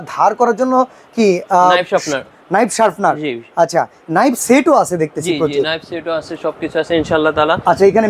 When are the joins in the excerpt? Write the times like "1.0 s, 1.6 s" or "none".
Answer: none